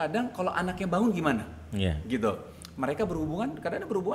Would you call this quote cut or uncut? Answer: uncut